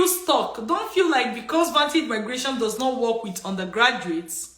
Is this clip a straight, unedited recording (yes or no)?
yes